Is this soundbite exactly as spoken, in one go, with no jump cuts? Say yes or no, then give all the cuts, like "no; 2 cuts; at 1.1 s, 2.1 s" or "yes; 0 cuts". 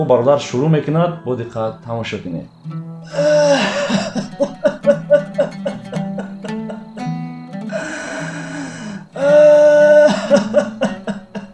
yes; 0 cuts